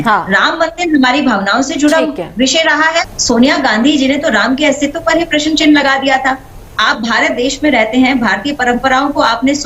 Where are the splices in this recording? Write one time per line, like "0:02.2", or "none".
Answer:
0:03.1